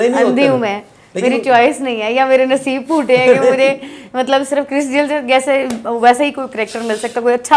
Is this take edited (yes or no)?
no